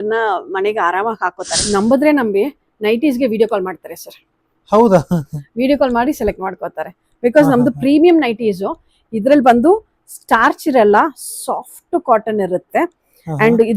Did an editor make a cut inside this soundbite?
yes; 1 cut; at 1.7 s

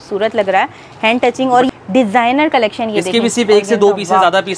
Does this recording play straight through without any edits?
no; 1 cut; at 1.7 s

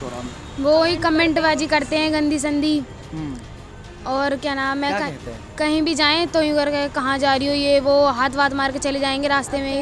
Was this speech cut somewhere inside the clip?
no; 0 cuts

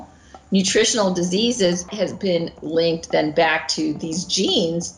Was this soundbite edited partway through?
yes; 1 cut; at 1.9 s

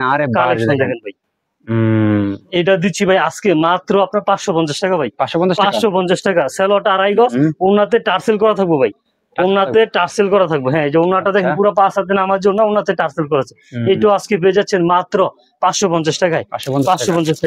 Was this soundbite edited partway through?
no; 0 cuts

